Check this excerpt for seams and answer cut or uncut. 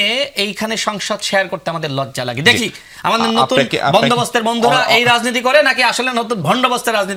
uncut